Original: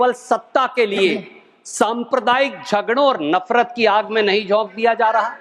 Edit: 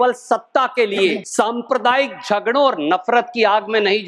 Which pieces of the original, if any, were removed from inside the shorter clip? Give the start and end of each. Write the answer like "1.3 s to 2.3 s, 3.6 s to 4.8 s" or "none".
1.2 s to 1.7 s